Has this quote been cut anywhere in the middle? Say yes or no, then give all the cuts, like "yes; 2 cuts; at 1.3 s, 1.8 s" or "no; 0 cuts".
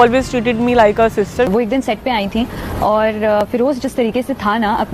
yes; 1 cut; at 1.5 s